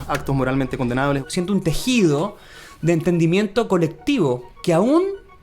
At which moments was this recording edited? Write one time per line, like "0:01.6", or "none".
0:01.3
0:04.5